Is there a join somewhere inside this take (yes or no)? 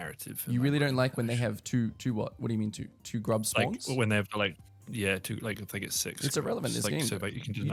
no